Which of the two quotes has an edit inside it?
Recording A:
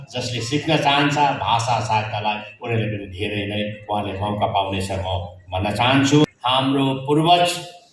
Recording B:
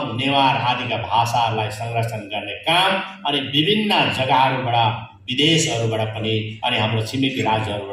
A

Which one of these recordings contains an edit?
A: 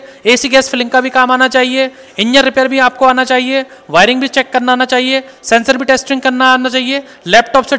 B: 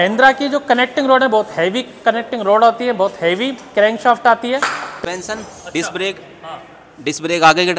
B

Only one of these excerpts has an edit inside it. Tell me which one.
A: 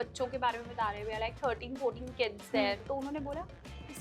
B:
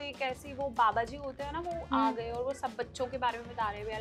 A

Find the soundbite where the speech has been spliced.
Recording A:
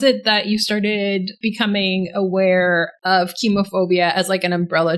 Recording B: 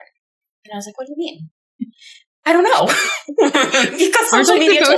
A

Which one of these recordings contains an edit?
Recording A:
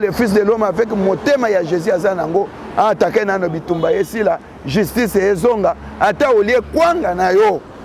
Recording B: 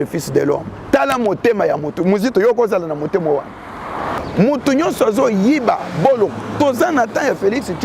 B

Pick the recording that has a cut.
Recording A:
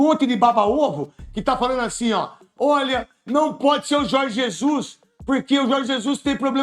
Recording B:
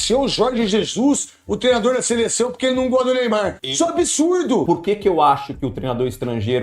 B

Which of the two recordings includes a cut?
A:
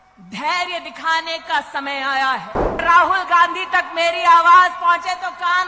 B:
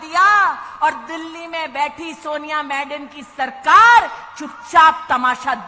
A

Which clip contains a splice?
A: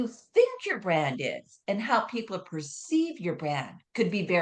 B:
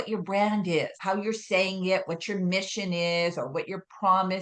B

